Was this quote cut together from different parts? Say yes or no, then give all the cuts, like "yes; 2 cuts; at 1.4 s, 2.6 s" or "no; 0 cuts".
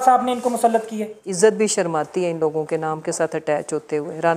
yes; 1 cut; at 1.2 s